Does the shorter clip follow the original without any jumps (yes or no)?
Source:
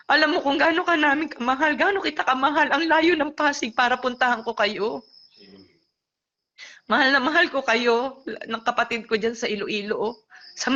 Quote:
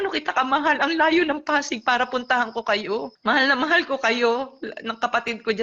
no